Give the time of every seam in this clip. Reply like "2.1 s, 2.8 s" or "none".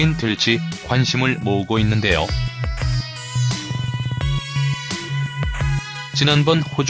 none

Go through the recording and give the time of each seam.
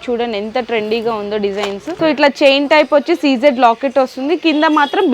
1.8 s

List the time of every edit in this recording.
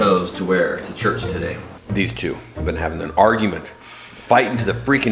1.7 s

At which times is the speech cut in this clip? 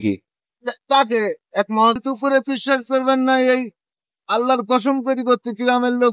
2.0 s

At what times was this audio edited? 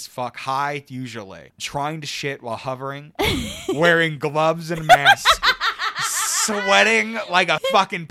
1.4 s

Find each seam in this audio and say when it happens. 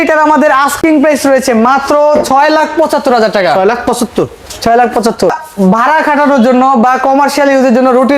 none

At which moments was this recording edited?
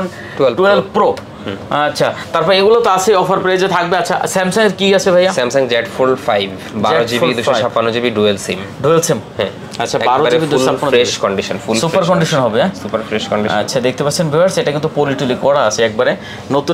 none

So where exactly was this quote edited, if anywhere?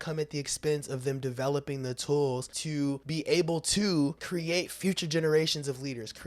2.9 s, 4.3 s

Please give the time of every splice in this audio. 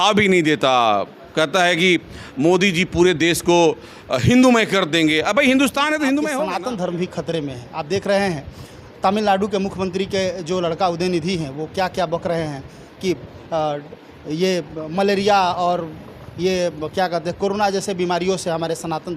6.4 s

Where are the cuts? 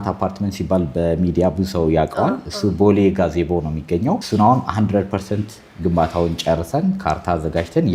none

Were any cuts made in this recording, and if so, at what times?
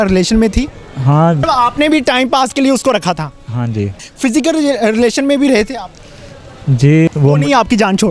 1.4 s, 4.0 s, 7.1 s

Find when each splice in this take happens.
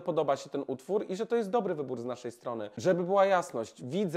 2.7 s

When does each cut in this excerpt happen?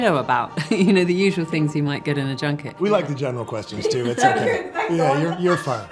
2.7 s, 5.0 s

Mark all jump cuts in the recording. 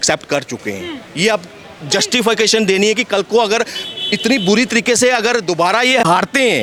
none

